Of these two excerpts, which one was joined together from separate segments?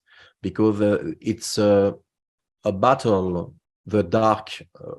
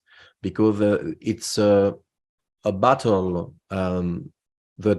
first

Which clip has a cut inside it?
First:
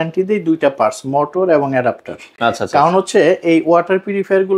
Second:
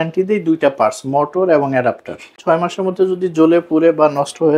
second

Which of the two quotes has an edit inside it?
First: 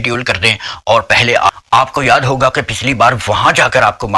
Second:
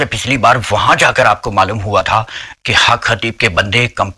first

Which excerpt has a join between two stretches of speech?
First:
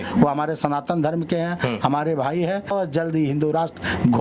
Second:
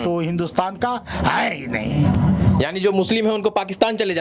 first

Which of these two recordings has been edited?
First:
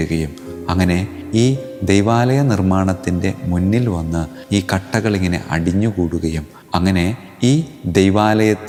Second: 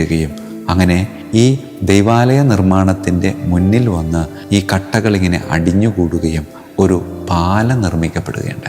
second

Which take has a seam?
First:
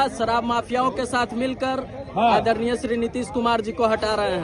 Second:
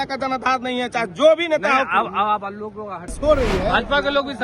second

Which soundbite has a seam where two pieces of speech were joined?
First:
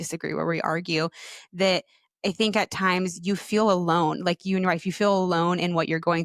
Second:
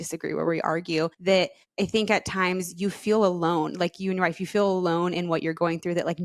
second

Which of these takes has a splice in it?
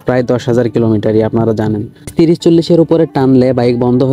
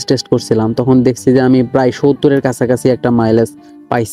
first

